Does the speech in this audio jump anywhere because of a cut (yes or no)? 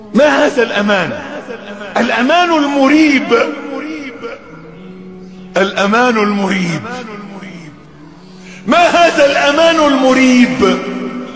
no